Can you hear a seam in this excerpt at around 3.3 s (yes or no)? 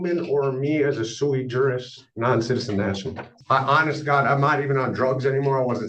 yes